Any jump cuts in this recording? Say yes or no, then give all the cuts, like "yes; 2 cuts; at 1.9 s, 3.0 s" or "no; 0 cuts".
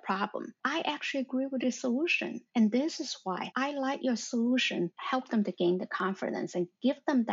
yes; 1 cut; at 5.0 s